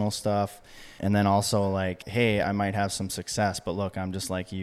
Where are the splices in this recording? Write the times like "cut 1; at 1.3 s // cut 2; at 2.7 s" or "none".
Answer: cut 1; at 1.0 s // cut 2; at 2.0 s